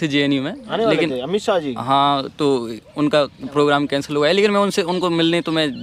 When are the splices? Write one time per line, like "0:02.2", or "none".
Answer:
none